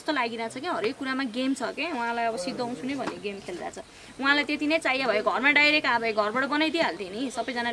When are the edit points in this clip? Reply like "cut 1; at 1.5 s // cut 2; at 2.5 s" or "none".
none